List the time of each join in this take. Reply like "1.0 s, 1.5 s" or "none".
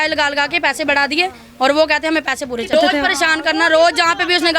2.7 s